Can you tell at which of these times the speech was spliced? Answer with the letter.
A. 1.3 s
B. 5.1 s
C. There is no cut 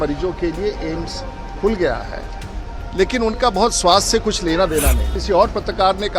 B